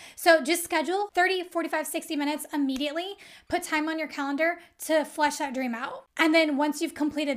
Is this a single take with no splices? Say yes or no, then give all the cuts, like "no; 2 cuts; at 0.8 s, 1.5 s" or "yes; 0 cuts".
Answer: no; 2 cuts; at 1.1 s, 6.1 s